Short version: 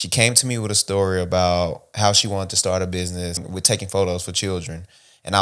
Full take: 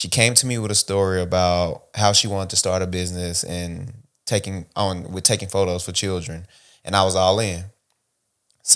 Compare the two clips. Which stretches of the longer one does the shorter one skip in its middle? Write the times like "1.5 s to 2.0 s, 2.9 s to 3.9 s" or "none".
3.4 s to 5.0 s